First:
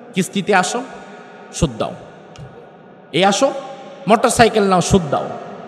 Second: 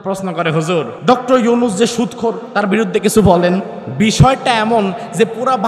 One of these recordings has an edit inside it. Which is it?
second; 3 cuts; at 0.9 s, 2.5 s, 3.8 s

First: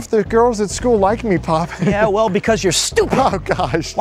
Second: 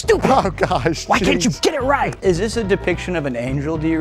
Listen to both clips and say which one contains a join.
second; 1 cut; at 2.1 s

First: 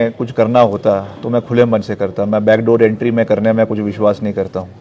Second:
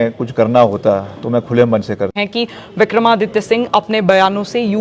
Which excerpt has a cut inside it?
second; 1 cut; at 2.1 s

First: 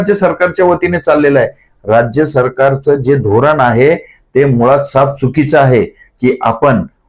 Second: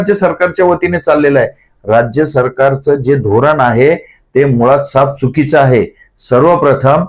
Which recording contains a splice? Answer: first; 1 cut; at 6.1 s

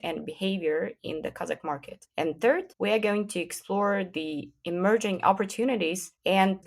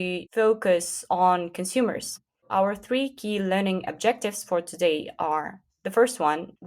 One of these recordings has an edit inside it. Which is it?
second; 1 cut; at 2.1 s

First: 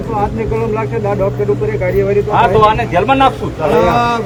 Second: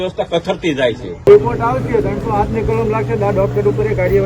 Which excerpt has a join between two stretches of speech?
second; 1 cut; at 1.3 s

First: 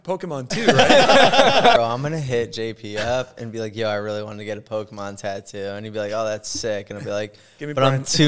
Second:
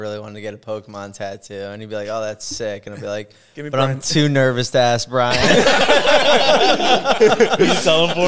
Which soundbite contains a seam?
first; 1 cut; at 1.8 s

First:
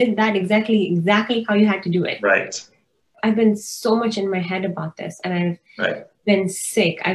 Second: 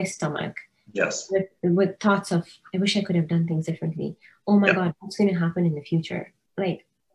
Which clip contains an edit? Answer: first; 1 cut; at 3.1 s

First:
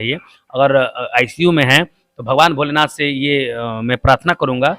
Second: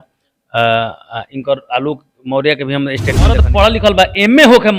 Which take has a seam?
second; 1 cut; at 3.5 s

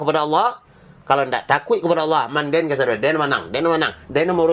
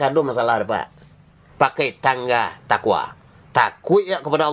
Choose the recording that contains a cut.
second; 1 cut; at 1.4 s

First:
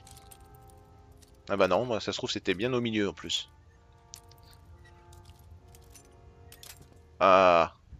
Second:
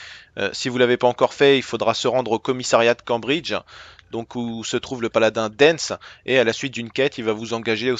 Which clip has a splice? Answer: second; 1 cut; at 3.5 s

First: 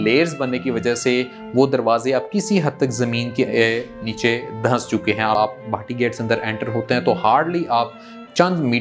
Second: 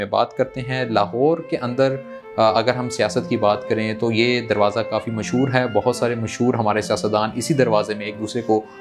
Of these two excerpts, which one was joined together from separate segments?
first; 1 cut; at 5.4 s

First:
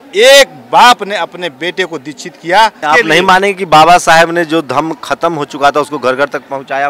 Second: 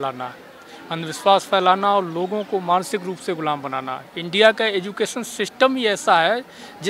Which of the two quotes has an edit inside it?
first; 1 cut; at 2.8 s

